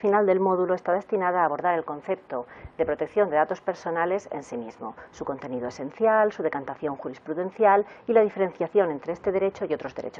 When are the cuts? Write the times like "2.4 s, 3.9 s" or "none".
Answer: 4.9 s